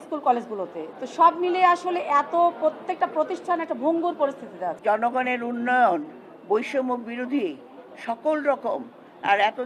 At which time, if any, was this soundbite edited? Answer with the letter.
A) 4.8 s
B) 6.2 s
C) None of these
A